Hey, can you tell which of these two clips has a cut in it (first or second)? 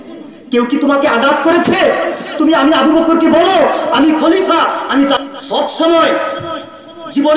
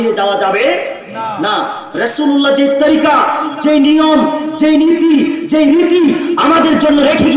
first